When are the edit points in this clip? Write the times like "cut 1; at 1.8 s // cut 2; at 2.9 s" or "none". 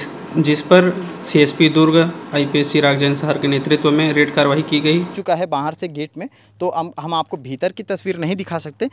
cut 1; at 5.2 s